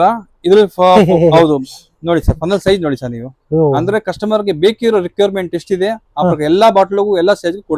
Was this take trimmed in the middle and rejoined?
no; 0 cuts

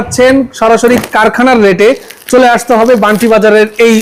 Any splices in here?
no; 0 cuts

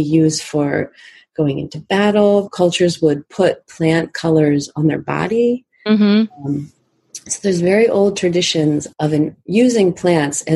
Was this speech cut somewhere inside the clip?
no; 0 cuts

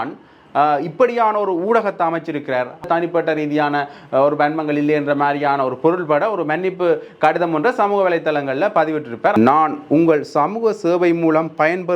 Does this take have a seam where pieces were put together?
yes; 2 cuts; at 2.8 s, 9.3 s

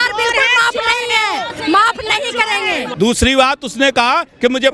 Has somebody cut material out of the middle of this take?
yes; 1 cut; at 2.9 s

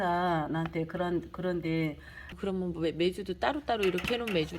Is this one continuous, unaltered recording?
no; 1 cut; at 2.3 s

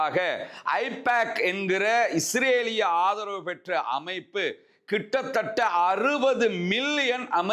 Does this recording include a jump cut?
no; 0 cuts

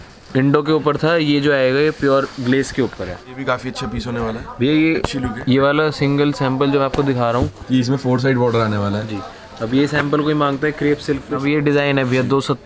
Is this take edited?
yes; 3 cuts; at 3.3 s, 7.6 s, 11.4 s

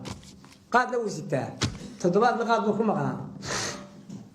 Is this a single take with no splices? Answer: yes; 0 cuts

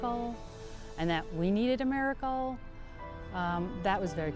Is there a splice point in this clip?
no; 0 cuts

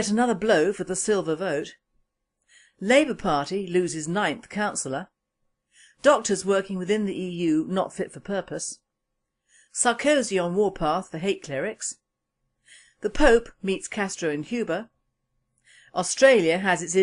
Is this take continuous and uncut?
yes; 0 cuts

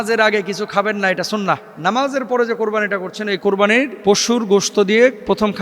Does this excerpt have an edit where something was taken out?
yes; 2 cuts; at 1.7 s, 3.9 s

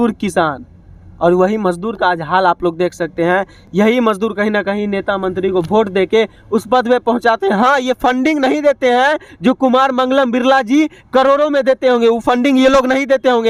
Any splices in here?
no; 0 cuts

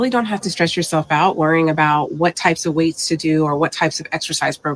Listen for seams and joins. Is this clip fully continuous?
no; 1 cut; at 3.6 s

